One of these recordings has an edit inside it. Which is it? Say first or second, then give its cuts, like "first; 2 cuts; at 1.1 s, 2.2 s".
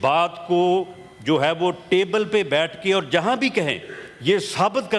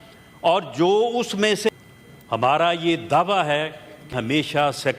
second; 2 cuts; at 1.7 s, 4.1 s